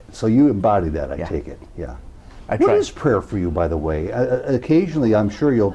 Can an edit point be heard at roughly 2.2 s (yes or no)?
no